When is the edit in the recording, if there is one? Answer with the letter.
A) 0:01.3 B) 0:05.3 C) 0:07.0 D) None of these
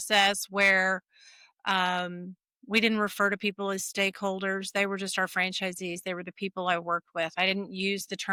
D